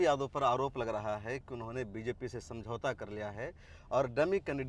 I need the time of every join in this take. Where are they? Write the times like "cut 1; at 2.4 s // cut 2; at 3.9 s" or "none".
none